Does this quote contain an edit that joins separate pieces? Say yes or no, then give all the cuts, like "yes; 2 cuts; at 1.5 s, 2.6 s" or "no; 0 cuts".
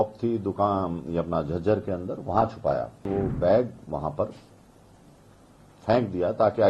yes; 1 cut; at 3.0 s